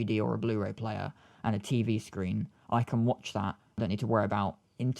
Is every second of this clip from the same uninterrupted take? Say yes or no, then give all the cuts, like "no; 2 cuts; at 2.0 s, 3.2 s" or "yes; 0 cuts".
no; 1 cut; at 3.8 s